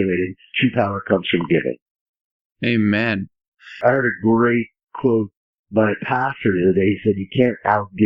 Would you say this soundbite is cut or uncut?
uncut